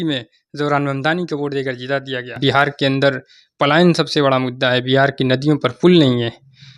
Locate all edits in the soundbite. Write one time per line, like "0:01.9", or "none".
0:02.4